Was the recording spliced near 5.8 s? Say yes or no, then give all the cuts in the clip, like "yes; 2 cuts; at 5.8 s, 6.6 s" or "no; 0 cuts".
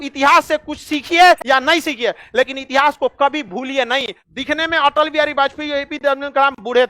no; 2 cuts; at 1.4 s, 4.2 s